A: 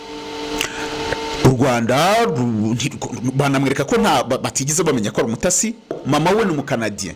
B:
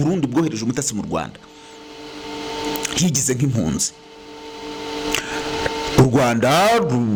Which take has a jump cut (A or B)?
A